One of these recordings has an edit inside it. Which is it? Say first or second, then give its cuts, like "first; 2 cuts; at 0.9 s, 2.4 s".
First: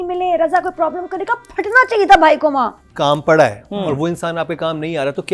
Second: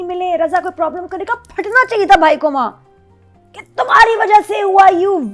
first; 1 cut; at 2.8 s